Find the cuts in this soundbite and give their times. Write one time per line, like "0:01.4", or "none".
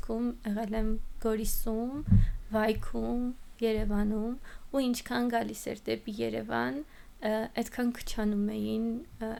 none